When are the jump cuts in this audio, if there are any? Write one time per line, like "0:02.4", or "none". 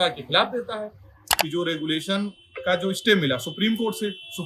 0:01.2